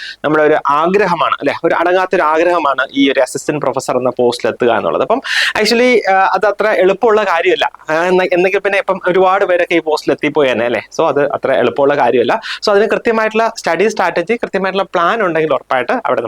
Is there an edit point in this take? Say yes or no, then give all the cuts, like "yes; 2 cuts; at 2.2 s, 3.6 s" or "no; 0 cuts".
no; 0 cuts